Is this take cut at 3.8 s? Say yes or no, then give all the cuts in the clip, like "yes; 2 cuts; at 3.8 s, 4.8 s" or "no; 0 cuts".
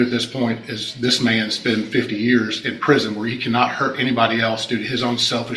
no; 0 cuts